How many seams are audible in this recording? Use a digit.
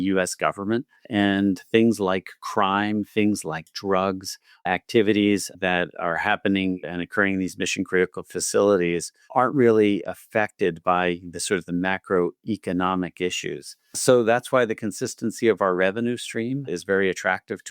1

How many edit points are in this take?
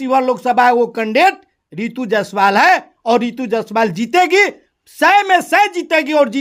0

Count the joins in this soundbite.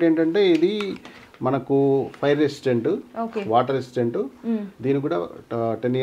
0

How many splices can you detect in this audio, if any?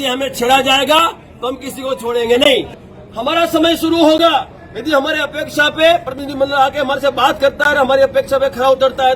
1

